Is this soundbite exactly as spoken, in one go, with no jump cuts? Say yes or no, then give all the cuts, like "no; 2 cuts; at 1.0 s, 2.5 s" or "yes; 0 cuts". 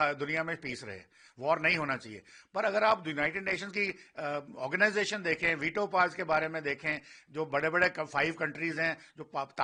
yes; 0 cuts